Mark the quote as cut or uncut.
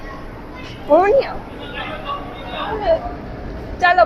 cut